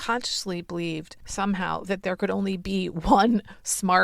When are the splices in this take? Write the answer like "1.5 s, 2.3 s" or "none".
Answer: 1.2 s

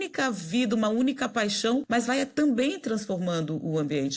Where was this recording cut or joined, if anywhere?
1.9 s

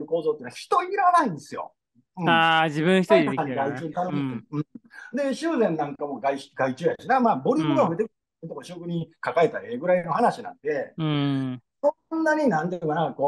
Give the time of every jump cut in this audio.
none

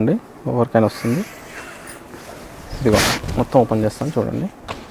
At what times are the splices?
none

